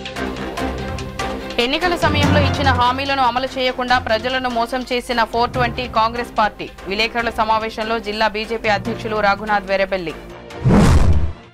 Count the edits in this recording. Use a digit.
1